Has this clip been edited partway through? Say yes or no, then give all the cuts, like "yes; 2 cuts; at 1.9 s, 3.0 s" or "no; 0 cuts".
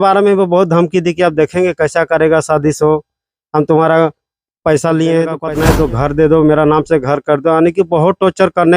yes; 1 cut; at 5.4 s